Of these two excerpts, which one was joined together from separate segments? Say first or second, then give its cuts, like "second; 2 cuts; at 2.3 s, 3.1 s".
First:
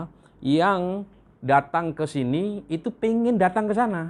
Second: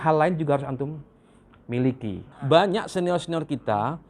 second; 1 cut; at 2.3 s